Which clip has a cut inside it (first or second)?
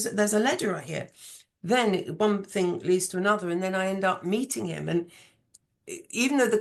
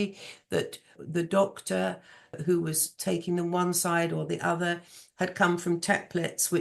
second